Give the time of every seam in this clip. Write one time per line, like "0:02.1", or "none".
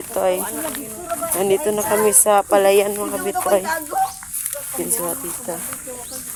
none